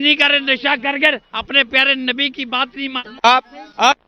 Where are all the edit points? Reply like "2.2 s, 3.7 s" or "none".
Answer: 3.0 s